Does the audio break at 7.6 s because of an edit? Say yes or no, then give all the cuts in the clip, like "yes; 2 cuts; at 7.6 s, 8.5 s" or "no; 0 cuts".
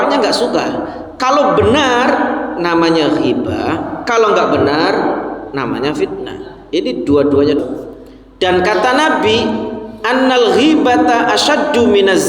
yes; 1 cut; at 7.6 s